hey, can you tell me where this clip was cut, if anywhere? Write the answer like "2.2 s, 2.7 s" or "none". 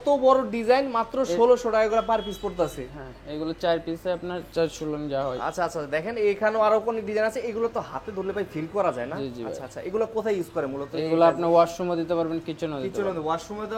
none